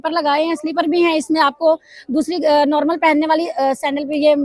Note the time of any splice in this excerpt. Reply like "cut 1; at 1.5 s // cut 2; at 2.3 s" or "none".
none